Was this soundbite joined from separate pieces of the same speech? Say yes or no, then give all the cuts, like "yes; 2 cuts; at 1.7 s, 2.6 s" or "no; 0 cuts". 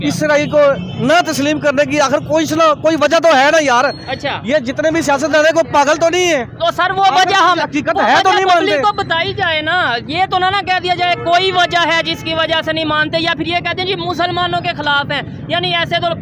no; 0 cuts